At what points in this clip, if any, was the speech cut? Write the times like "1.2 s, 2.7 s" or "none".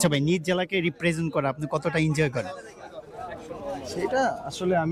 none